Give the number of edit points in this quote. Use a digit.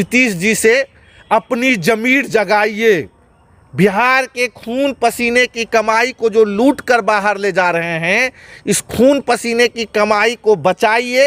0